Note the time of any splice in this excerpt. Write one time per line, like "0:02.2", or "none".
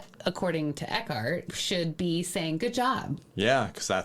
0:01.6